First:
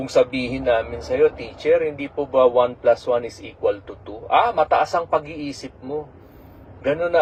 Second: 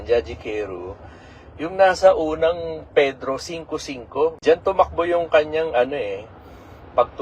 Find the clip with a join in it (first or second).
second